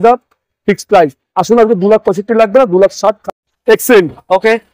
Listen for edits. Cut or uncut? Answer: cut